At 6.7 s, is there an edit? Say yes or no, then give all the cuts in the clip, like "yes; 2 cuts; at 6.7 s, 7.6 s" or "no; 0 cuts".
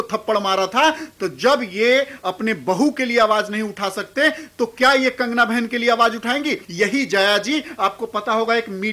yes; 1 cut; at 6.7 s